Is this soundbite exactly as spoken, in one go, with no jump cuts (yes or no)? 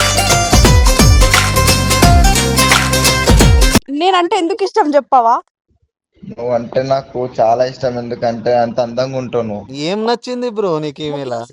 no